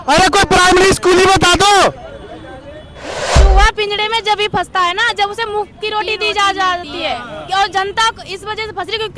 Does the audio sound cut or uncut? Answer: cut